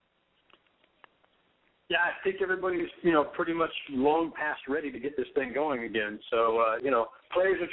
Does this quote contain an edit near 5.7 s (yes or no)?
yes